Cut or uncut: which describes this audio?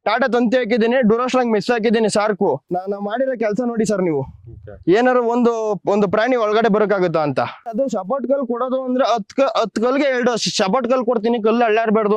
cut